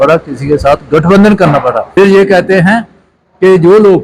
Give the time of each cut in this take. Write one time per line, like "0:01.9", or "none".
0:01.8